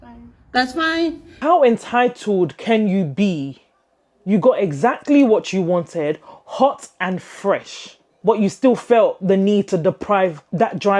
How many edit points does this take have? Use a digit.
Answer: 1